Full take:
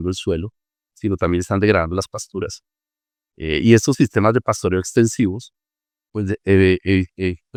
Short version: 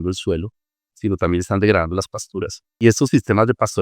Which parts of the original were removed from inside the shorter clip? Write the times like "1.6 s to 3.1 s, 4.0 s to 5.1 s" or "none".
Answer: 2.8 s to 3.7 s